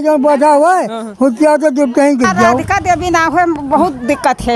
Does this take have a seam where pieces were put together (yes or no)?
yes